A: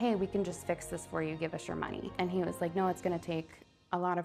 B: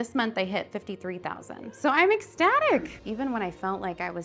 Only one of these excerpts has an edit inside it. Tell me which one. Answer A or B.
B